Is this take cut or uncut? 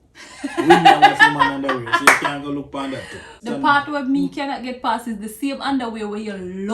cut